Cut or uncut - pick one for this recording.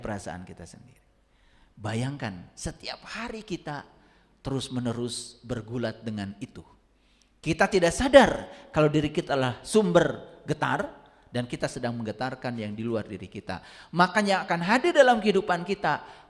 uncut